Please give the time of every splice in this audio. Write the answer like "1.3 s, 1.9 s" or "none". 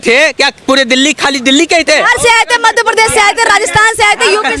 none